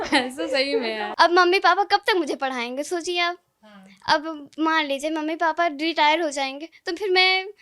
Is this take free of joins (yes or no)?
no